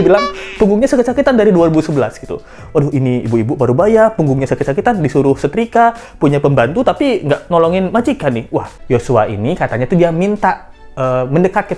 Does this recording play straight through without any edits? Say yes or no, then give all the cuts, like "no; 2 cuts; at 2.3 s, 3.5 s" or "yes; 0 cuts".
no; 1 cut; at 8.7 s